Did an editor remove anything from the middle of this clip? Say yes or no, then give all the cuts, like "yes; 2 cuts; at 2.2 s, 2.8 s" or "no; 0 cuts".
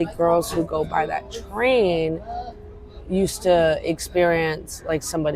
no; 0 cuts